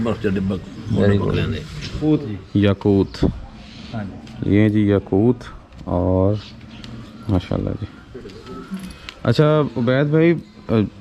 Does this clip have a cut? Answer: yes; 1 cut; at 2.0 s

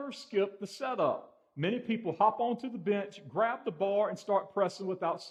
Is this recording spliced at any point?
no; 0 cuts

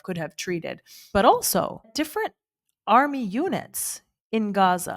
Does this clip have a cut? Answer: yes; 2 cuts; at 0.9 s, 1.9 s

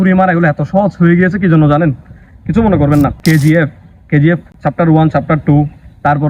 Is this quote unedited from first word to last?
no; 1 cut; at 3.2 s

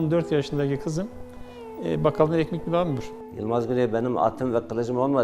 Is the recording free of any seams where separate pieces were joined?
no; 1 cut; at 3.1 s

